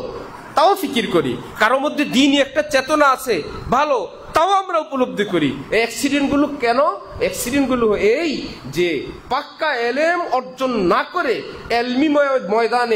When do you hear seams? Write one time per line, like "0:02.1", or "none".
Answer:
none